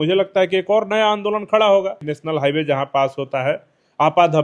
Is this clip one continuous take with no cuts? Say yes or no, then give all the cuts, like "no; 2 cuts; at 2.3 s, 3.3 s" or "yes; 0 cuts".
no; 1 cut; at 2.1 s